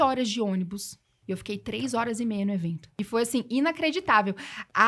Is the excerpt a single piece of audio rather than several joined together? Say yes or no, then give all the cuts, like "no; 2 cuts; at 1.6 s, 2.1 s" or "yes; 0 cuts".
no; 2 cuts; at 1.1 s, 2.8 s